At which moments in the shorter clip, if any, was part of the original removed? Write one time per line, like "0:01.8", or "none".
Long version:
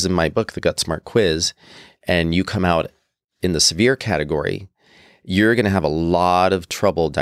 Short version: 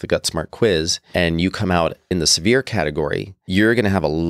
0:01.0
0:02.0
0:03.3